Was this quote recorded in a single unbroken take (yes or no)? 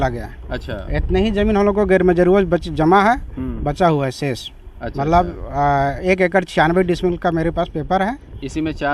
yes